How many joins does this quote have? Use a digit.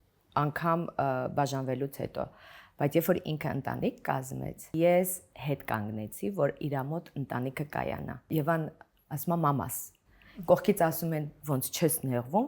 2